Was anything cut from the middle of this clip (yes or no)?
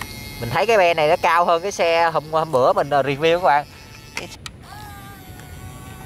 yes